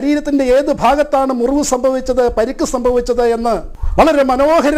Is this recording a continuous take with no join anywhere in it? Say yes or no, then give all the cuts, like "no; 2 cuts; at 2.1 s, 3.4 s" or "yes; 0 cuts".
no; 1 cut; at 3.8 s